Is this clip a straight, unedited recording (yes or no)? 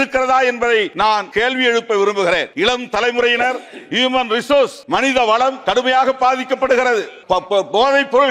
no